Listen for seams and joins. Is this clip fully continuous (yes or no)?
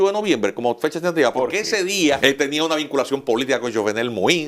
no